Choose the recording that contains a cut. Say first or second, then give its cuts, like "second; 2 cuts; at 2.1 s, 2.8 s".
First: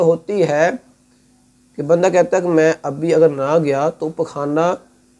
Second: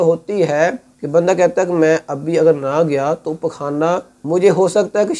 second; 2 cuts; at 0.9 s, 4.1 s